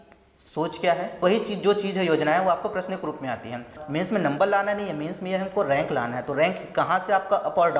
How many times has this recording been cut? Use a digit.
2